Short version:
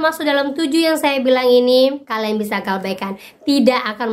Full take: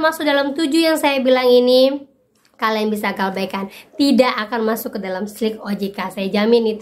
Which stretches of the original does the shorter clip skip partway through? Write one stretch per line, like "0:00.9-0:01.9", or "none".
0:02.0-0:02.6